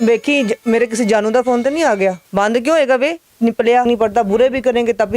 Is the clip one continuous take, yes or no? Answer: no